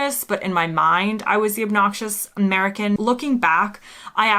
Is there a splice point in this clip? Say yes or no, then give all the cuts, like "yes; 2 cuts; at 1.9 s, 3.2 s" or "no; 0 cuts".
yes; 1 cut; at 3.0 s